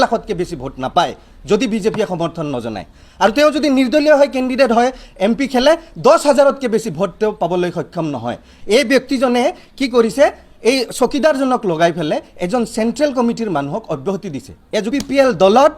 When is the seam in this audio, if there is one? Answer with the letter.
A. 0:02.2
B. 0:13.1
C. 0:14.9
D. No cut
C